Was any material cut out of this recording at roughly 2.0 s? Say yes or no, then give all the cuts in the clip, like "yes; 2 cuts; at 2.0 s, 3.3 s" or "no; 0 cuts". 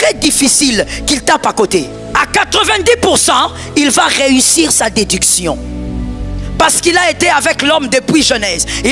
yes; 1 cut; at 2.0 s